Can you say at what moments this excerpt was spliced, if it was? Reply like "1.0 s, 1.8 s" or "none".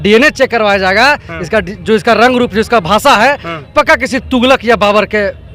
none